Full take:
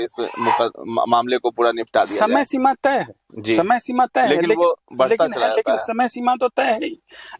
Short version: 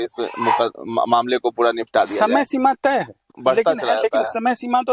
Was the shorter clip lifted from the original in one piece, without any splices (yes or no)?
no